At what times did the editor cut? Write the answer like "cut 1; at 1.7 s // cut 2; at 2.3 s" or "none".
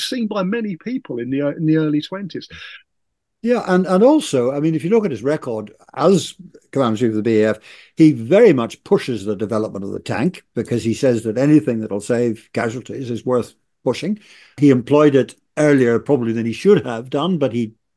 cut 1; at 2.9 s // cut 2; at 14.5 s